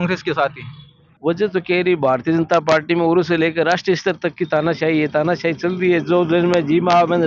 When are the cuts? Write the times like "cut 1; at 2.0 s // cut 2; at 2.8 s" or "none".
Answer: cut 1; at 1.1 s